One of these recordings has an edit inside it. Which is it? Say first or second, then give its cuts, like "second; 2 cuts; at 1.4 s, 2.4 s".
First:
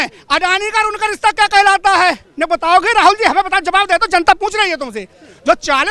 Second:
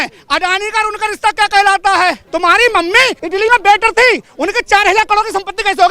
second; 2 cuts; at 2.2 s, 3.2 s